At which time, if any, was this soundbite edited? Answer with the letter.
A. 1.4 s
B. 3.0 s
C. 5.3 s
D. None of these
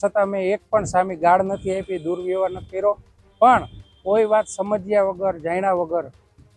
D